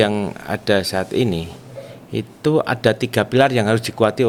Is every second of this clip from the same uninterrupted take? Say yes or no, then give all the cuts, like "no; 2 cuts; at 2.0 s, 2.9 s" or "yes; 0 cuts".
yes; 0 cuts